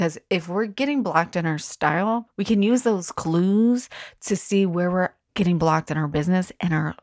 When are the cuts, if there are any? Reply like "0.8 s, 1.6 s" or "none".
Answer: 2.3 s, 5.2 s